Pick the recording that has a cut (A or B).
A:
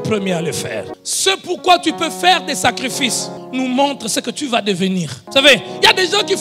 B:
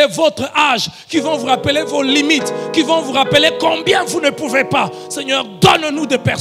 A